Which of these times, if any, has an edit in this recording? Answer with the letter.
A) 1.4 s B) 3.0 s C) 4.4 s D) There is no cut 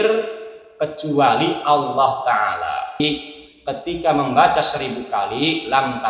B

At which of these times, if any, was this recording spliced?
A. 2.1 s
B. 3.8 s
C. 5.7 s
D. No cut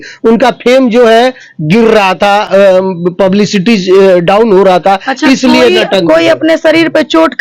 D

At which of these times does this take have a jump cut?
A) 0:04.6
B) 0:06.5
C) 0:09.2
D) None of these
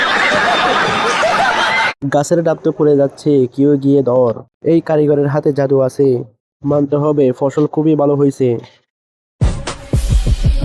C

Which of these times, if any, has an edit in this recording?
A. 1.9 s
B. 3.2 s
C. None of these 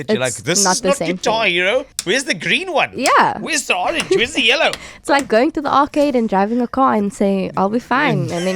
A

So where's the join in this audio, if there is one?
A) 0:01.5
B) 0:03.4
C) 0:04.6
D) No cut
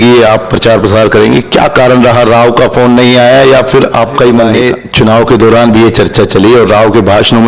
C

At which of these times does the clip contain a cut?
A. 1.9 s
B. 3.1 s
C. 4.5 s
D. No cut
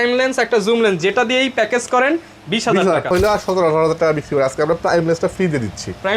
B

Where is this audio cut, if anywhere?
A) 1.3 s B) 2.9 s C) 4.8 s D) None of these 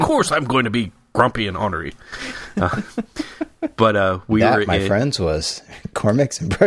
D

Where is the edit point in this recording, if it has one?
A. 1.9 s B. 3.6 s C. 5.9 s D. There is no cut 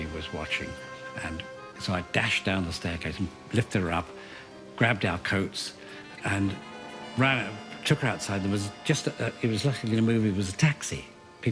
C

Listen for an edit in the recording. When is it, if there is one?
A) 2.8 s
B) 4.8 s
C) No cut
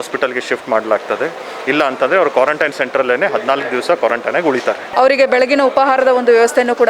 B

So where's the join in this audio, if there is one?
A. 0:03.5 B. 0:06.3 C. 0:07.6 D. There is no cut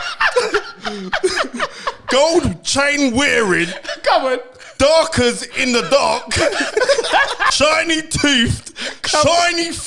C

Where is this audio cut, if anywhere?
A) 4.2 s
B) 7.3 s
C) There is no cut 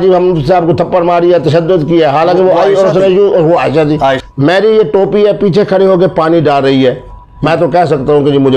A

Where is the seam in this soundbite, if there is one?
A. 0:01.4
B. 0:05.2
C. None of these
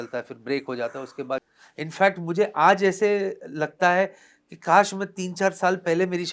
A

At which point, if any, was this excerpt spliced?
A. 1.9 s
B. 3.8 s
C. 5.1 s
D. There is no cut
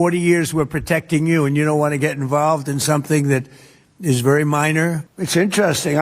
C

